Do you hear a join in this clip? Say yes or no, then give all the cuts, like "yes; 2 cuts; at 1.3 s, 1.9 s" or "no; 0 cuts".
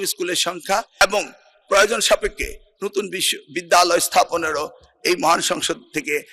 no; 0 cuts